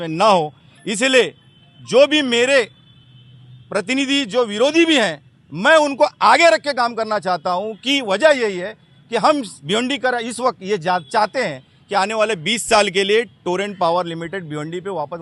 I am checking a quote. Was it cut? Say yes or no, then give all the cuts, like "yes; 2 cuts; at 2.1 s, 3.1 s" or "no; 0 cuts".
no; 0 cuts